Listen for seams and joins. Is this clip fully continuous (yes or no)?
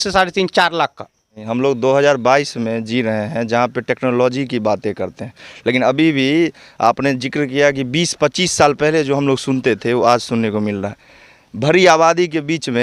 no